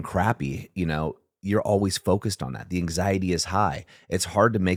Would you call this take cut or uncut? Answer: uncut